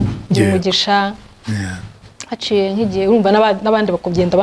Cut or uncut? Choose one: uncut